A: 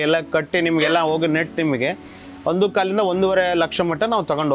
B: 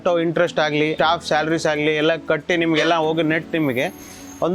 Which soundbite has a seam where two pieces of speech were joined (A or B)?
B